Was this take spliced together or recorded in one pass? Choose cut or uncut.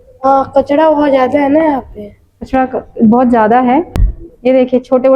cut